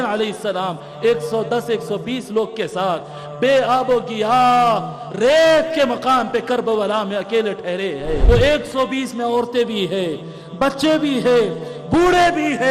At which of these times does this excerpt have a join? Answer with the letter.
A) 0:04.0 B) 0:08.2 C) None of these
B